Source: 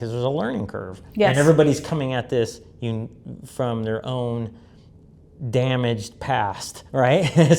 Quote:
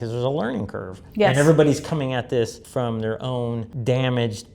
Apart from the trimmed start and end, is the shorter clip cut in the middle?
yes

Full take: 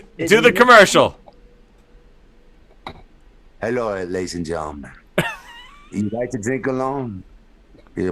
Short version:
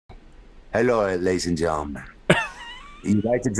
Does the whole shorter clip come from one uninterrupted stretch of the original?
yes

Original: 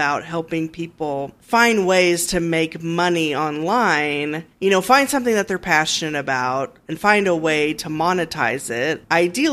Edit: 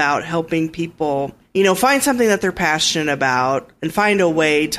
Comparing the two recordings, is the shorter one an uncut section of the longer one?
no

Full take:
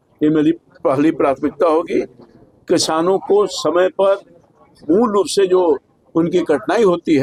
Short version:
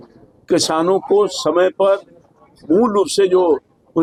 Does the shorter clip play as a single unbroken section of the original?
yes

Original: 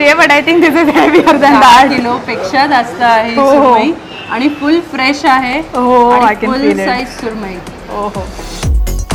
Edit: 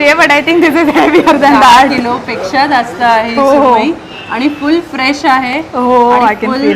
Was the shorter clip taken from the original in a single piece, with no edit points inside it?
yes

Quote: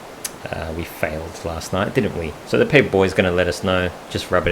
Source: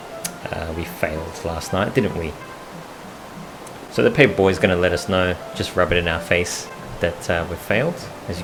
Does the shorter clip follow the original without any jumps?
no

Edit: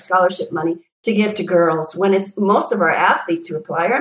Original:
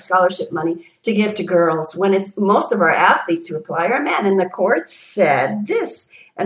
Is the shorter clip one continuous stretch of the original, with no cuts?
yes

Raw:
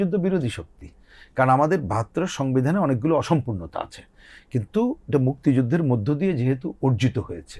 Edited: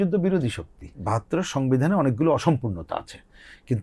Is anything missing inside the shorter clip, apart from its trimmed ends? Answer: yes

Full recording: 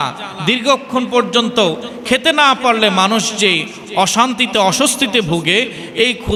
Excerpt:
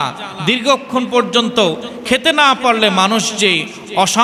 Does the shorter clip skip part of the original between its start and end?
no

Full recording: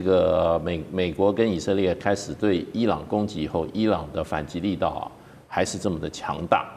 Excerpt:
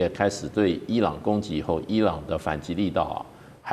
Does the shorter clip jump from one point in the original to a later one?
no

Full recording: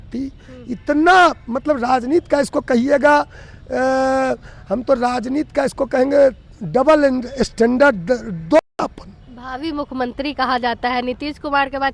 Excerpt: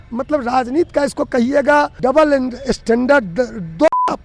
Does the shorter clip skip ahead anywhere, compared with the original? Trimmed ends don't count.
yes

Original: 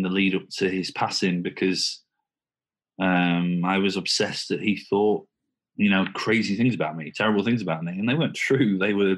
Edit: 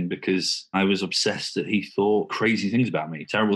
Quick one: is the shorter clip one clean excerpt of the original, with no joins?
no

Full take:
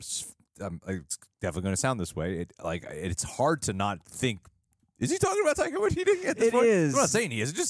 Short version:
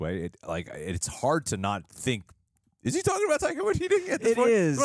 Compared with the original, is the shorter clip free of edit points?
yes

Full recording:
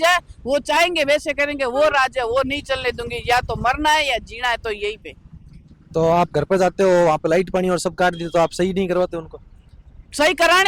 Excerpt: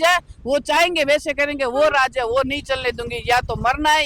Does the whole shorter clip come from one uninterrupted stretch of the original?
yes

